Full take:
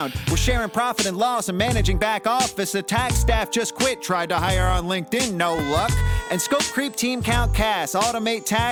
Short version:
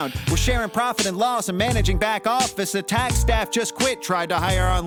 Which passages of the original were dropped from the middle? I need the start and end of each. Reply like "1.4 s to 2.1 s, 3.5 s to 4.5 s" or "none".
none